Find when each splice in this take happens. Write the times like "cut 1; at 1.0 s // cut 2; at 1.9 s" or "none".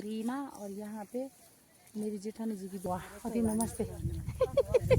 cut 1; at 2.8 s